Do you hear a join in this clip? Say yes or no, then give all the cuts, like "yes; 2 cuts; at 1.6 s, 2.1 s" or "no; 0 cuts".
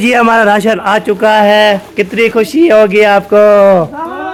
no; 0 cuts